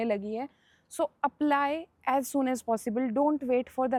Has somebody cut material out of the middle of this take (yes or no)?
no